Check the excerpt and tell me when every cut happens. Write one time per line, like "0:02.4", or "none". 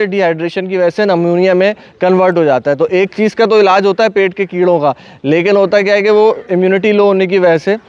none